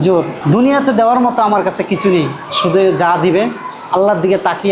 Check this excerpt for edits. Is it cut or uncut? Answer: uncut